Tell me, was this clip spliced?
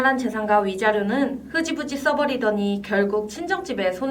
no; 0 cuts

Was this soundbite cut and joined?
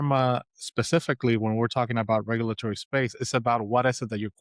no; 0 cuts

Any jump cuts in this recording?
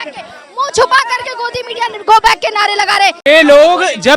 yes; 1 cut; at 3.2 s

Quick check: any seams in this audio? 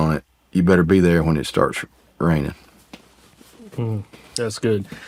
no; 0 cuts

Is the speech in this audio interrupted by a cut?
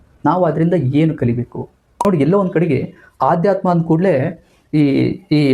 yes; 1 cut; at 1.9 s

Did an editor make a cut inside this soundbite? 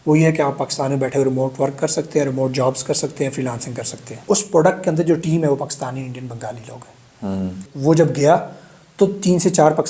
yes; 2 cuts; at 4.2 s, 7.7 s

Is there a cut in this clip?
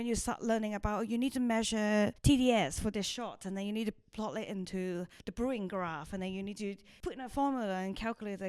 yes; 3 cuts; at 2.2 s, 5.2 s, 6.6 s

